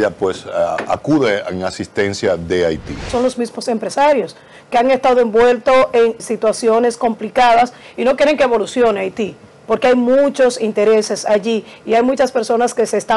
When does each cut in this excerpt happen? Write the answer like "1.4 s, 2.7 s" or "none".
3.0 s, 6.2 s